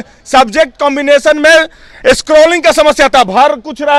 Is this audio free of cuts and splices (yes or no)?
yes